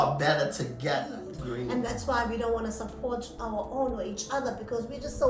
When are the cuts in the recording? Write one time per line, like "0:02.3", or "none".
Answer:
0:01.1